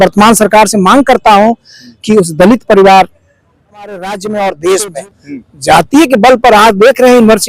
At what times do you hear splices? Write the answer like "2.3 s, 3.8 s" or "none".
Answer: 4.0 s